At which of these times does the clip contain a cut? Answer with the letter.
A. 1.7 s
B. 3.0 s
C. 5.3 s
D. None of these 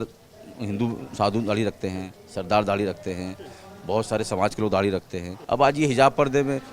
C